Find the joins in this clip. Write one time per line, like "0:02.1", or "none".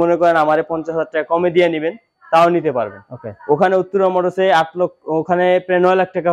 none